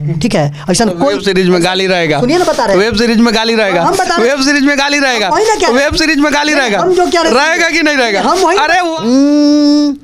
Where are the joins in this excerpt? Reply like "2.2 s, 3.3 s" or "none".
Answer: 9.1 s